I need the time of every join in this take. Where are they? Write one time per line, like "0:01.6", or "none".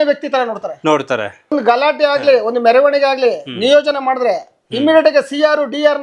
0:01.6